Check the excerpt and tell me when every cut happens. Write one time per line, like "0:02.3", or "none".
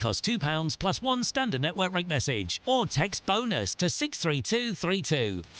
0:02.5